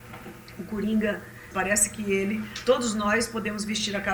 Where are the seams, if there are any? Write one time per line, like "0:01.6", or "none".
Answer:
0:01.5